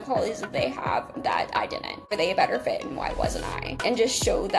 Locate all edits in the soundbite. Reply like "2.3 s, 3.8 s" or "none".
2.1 s, 3.8 s